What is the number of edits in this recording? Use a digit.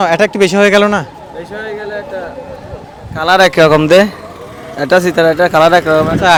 0